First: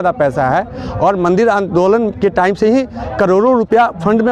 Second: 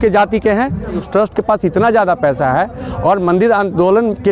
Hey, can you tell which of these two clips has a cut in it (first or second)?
second